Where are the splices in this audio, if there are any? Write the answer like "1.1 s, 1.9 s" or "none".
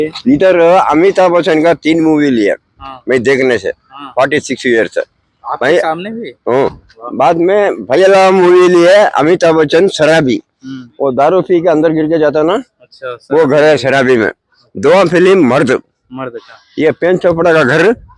none